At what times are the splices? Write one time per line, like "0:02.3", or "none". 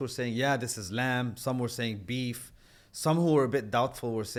none